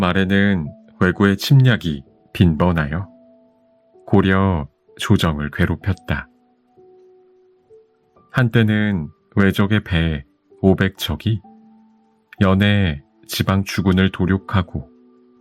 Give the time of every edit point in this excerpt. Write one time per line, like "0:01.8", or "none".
0:06.3
0:08.3